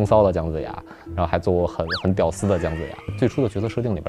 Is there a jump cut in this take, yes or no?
yes